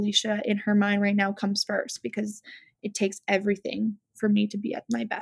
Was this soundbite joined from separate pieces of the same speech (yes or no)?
no